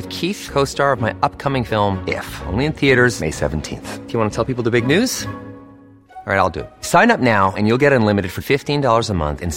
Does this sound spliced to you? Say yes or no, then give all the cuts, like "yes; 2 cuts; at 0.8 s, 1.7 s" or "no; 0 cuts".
no; 0 cuts